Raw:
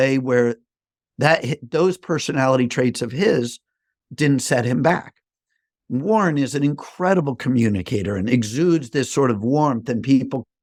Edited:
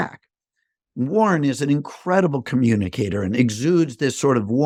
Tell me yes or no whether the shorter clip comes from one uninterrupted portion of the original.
yes